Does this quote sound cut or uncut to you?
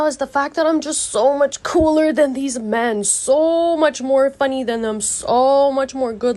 uncut